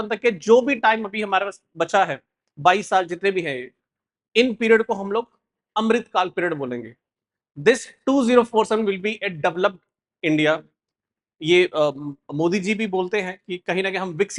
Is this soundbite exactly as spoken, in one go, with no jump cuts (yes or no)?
yes